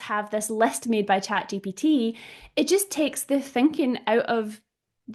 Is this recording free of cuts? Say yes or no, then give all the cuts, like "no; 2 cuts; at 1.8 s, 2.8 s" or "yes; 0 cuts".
yes; 0 cuts